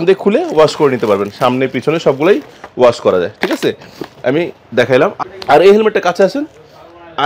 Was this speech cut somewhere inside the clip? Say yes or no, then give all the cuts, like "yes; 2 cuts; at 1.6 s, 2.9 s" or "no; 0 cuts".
no; 0 cuts